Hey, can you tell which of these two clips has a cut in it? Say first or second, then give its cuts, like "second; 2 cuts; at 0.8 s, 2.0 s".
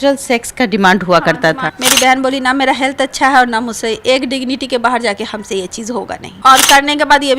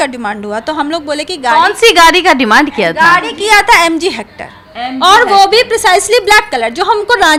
first; 2 cuts; at 1.7 s, 6.2 s